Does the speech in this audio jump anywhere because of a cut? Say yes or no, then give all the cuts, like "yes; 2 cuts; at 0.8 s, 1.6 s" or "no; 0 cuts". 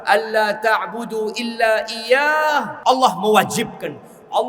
yes; 1 cut; at 2.7 s